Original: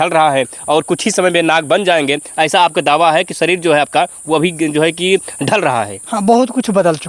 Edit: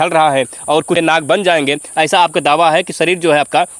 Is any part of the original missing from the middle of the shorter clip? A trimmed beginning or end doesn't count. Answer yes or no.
yes